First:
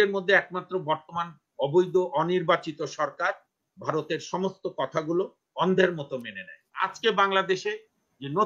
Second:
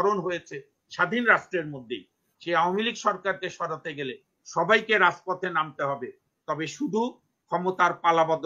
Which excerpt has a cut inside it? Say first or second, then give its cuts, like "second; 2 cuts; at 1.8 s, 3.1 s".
first; 1 cut; at 6.9 s